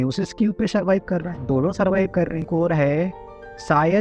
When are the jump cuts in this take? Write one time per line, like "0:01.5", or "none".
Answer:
0:02.5